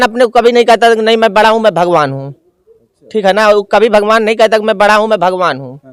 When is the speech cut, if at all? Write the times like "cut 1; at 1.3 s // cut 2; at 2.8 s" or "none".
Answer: none

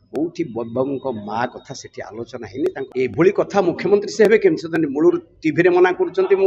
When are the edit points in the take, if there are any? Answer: cut 1; at 2.9 s

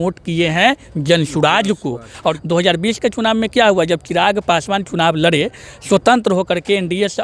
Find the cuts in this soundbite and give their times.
cut 1; at 2.4 s

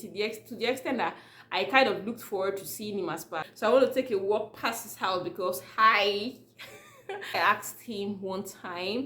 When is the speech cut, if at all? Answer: cut 1; at 3.4 s // cut 2; at 7.4 s

